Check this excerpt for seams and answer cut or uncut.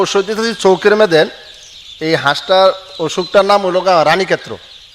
uncut